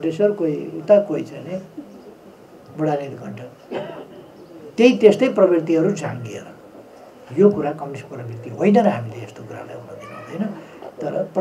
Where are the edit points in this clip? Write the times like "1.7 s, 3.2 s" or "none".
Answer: none